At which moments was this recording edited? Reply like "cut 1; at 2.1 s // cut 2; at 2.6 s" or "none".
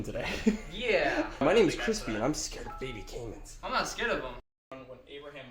cut 1; at 4.4 s

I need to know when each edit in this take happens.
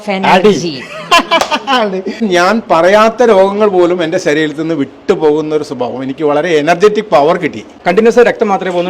cut 1; at 2.2 s // cut 2; at 7.7 s

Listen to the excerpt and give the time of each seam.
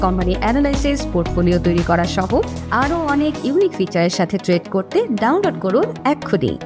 none

